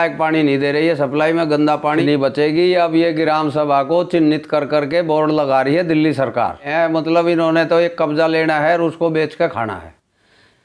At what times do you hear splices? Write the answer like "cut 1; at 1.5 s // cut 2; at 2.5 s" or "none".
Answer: cut 1; at 2.0 s // cut 2; at 6.7 s